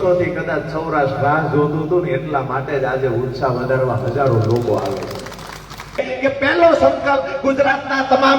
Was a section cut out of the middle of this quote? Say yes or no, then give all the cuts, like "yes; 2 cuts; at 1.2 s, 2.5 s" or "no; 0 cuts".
yes; 1 cut; at 6.0 s